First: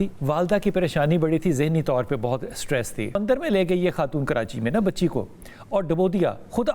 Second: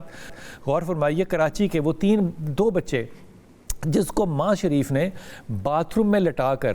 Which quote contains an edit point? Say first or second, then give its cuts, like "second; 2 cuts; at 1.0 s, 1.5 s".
first; 1 cut; at 3.1 s